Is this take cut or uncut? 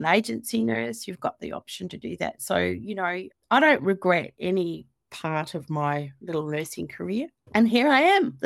cut